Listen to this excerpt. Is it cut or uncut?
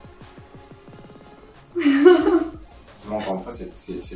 cut